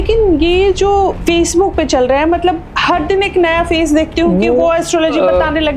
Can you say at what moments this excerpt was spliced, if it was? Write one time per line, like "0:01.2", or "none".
0:01.2